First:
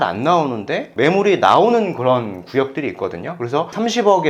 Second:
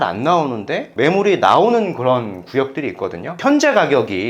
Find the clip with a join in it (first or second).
second